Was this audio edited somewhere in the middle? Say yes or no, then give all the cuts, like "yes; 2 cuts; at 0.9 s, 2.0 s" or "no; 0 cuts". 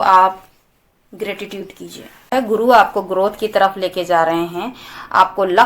yes; 1 cut; at 2.3 s